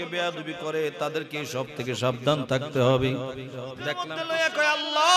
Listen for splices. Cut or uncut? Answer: cut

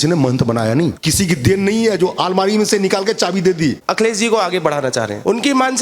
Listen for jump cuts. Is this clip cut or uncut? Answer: cut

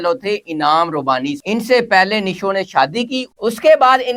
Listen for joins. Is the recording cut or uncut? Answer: uncut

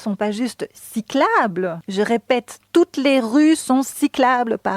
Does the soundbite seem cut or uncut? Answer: cut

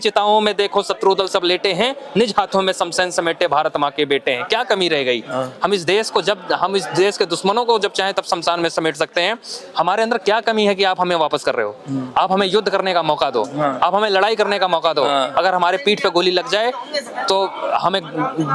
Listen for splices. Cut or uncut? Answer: uncut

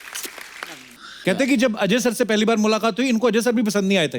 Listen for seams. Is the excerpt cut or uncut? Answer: cut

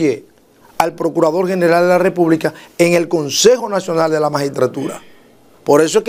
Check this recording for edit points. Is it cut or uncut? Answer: uncut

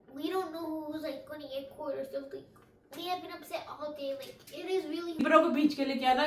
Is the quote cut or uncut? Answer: cut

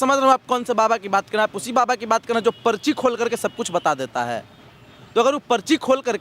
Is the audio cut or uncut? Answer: uncut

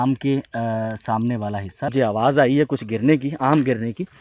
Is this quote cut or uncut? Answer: cut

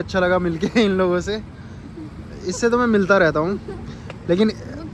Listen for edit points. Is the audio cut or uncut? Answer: uncut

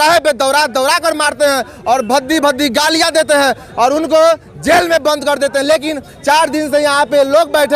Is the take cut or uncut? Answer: uncut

